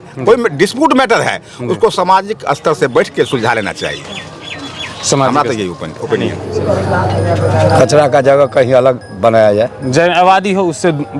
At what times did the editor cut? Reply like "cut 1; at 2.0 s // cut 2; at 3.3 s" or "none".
cut 1; at 6.4 s